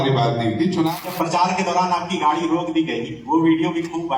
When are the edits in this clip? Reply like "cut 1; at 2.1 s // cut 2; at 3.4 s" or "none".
cut 1; at 0.9 s